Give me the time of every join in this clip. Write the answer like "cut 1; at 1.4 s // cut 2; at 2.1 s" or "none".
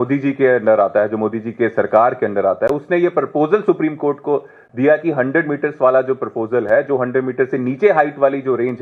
none